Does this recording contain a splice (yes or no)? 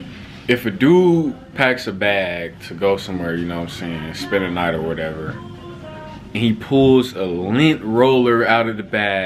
no